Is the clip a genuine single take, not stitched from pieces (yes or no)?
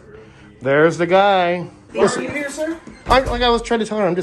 no